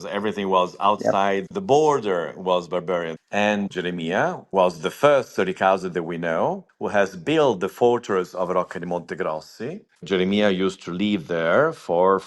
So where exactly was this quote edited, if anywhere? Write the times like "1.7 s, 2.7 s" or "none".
3.6 s, 6.7 s, 10.0 s